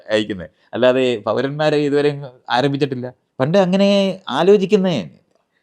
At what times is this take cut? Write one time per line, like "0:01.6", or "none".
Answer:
0:03.2